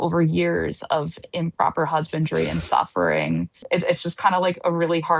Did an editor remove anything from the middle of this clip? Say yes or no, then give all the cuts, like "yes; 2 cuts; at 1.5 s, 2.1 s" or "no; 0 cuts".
yes; 1 cut; at 3.6 s